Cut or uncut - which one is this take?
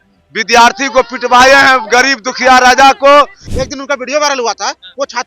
cut